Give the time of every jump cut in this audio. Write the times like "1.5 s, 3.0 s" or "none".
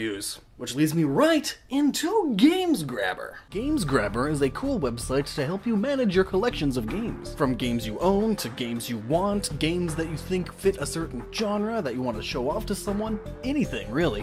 none